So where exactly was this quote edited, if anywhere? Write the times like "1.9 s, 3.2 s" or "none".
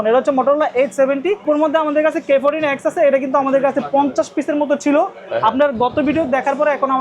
1.4 s